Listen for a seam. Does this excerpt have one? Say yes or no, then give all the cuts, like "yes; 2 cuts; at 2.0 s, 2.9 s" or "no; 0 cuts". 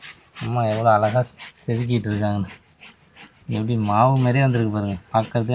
no; 0 cuts